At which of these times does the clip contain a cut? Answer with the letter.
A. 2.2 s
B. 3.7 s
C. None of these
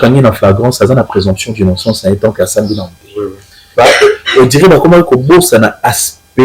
B